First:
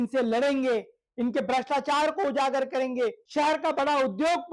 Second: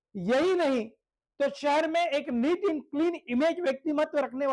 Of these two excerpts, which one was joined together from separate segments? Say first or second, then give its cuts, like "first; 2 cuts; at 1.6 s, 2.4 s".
first; 1 cut; at 3.2 s